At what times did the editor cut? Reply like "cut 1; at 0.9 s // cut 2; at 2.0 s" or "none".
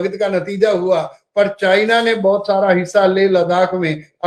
none